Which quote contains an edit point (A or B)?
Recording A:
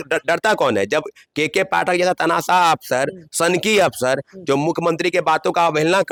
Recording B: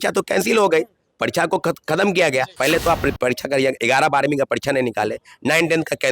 B